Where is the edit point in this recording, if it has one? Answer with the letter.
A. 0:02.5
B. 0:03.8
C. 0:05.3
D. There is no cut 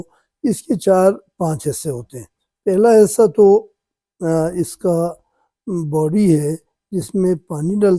D